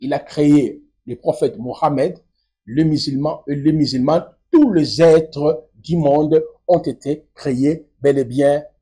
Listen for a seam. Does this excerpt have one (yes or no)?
no